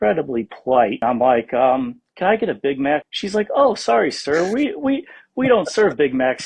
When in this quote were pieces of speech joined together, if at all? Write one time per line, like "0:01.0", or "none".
0:01.0